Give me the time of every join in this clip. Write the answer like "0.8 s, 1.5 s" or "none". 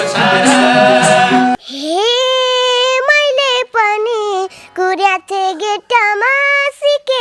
1.6 s